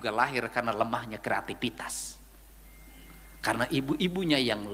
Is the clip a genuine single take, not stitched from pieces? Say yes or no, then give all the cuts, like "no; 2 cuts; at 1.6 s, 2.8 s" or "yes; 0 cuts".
yes; 0 cuts